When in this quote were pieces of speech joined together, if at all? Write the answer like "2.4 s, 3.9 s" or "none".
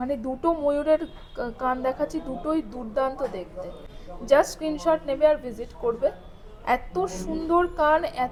none